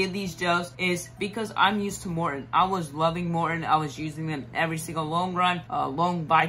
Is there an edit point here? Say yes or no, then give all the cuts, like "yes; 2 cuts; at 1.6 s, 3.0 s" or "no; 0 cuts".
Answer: no; 0 cuts